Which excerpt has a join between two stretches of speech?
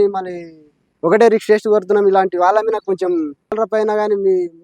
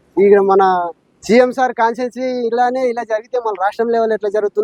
first; 1 cut; at 3.6 s

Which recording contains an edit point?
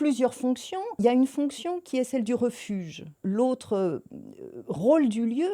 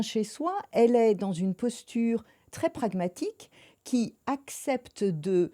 first; 2 cuts; at 1.0 s, 3.2 s

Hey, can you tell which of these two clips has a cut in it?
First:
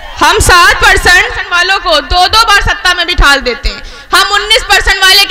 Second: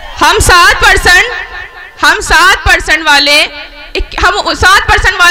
first; 1 cut; at 1.5 s

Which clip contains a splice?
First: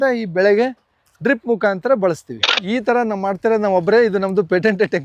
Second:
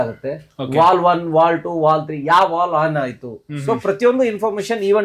first; 1 cut; at 2.5 s

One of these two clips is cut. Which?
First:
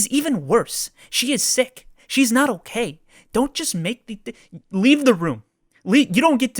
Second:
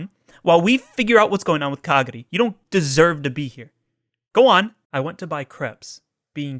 second; 1 cut; at 4.8 s

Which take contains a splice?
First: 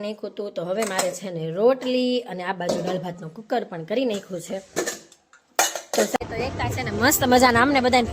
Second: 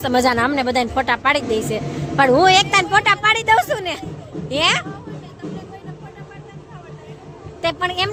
first; 1 cut; at 6.2 s

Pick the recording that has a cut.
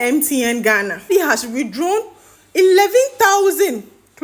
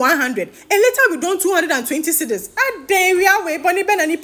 first; 1 cut; at 1.1 s

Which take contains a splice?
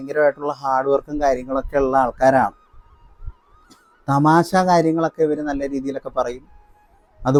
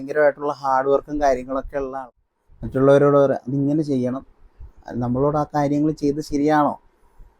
second; 1 cut; at 2.0 s

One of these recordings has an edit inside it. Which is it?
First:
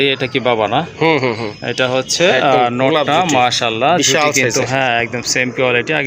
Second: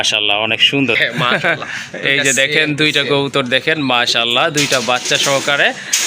second; 1 cut; at 1.0 s

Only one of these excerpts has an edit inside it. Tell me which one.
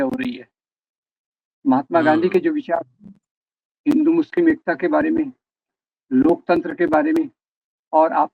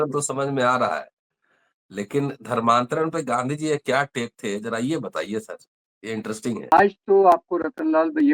second; 1 cut; at 6.7 s

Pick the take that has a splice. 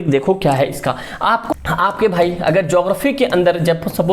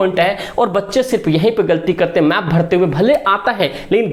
first; 1 cut; at 1.4 s

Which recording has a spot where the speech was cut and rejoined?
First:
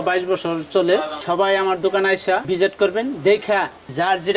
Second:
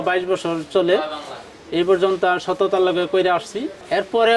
first; 1 cut; at 1.1 s

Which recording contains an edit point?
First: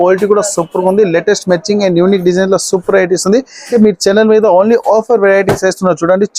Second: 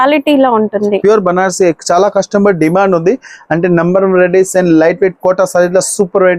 first; 1 cut; at 3.7 s

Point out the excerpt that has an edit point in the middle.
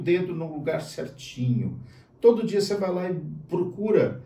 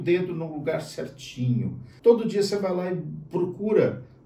second; 1 cut; at 1.8 s

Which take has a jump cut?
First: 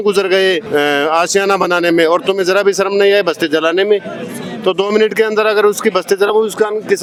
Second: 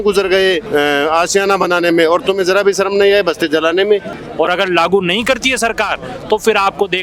second; 1 cut; at 4.2 s

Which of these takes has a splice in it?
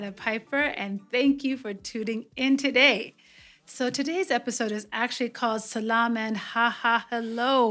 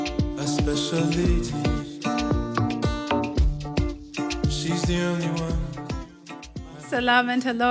second; 1 cut; at 6.8 s

